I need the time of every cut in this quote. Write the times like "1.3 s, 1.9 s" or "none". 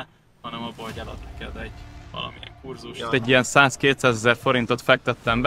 3.1 s